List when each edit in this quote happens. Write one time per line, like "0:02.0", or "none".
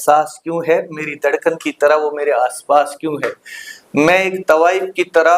none